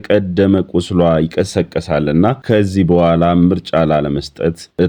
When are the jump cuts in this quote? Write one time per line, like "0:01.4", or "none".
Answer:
none